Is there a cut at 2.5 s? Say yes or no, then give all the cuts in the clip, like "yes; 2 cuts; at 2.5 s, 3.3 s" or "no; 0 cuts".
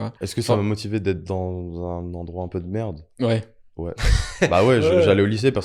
no; 0 cuts